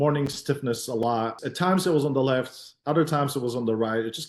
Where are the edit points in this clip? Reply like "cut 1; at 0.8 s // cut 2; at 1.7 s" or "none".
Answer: cut 1; at 1.3 s